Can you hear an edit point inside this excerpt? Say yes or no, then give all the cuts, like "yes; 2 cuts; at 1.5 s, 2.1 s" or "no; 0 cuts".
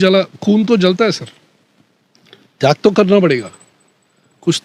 no; 0 cuts